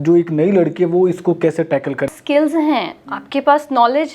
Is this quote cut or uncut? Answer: cut